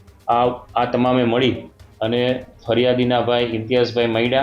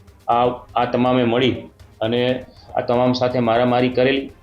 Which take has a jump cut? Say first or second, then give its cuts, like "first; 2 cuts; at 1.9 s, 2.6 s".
second; 1 cut; at 2.5 s